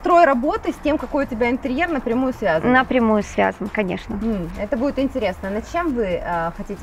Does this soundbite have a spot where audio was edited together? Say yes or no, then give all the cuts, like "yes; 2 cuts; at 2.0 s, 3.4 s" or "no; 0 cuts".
no; 0 cuts